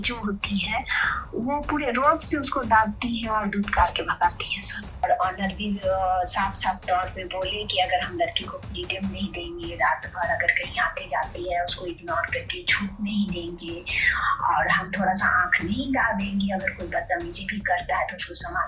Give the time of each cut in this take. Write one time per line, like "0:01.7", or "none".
0:05.0

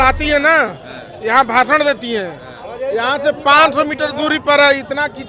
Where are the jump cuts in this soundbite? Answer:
none

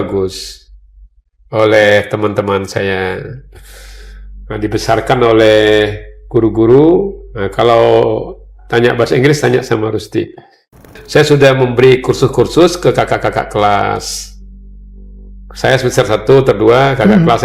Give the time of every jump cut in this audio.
0:11.0

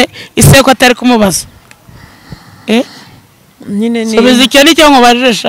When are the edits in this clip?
none

